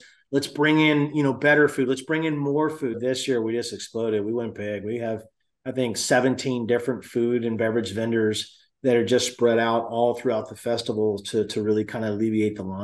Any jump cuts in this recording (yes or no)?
yes